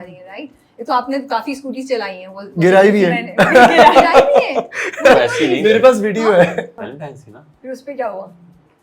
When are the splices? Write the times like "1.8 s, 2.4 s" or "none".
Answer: 6.7 s